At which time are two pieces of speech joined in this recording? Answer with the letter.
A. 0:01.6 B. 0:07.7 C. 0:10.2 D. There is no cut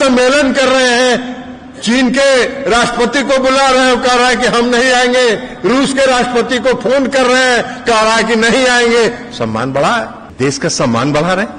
C